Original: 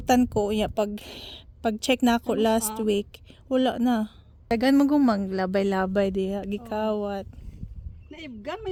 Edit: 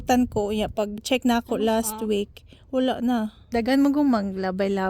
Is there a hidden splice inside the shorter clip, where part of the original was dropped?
yes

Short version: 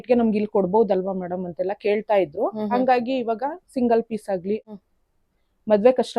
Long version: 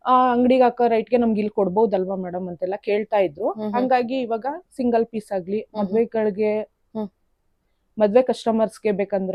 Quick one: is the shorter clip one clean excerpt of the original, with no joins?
no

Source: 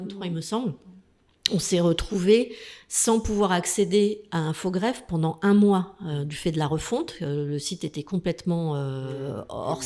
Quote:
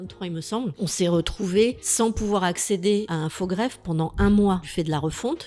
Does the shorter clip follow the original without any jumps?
no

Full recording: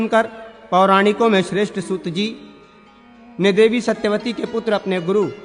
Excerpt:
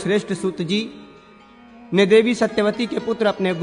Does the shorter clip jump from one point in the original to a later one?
no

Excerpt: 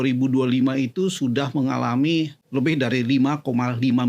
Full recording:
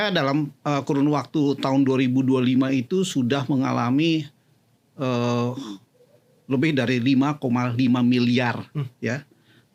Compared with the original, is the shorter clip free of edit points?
no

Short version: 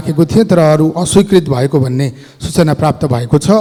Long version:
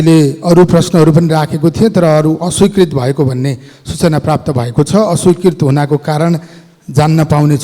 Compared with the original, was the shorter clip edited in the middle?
no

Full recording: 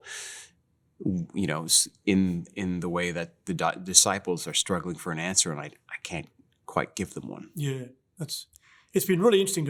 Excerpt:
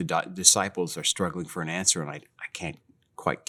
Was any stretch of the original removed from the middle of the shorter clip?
no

